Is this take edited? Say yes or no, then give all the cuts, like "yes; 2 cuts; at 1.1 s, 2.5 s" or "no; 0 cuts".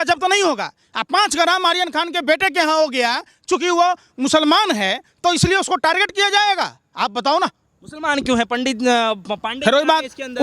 no; 0 cuts